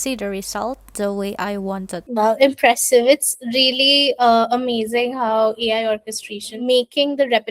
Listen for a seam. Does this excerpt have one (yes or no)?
yes